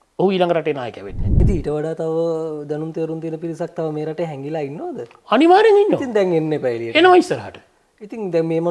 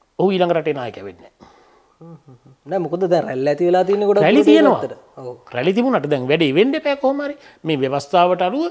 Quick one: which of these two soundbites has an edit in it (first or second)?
first